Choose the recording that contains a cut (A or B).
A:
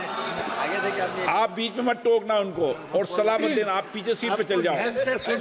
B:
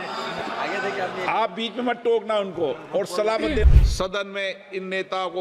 B